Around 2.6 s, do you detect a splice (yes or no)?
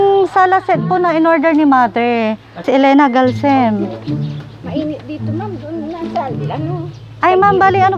yes